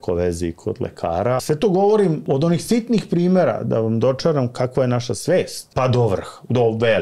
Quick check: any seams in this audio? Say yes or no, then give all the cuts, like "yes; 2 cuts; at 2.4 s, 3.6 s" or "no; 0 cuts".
yes; 3 cuts; at 1.4 s, 2.2 s, 5.7 s